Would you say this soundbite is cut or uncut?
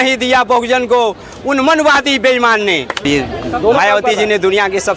cut